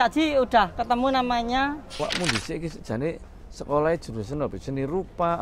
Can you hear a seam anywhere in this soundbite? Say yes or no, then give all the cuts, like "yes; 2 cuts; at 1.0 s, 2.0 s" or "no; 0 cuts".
yes; 1 cut; at 1.9 s